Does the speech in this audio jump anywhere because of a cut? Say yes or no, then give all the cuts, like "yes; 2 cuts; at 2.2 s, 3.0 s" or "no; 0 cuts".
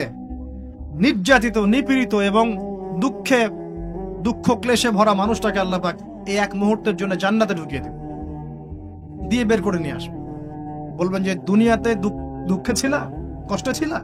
no; 0 cuts